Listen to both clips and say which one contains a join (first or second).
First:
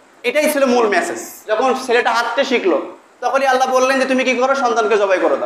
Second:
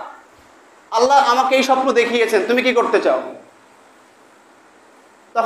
first